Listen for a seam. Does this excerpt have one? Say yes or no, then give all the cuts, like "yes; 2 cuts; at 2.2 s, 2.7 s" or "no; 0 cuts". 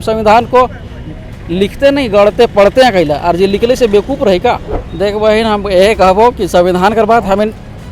yes; 1 cut; at 4.7 s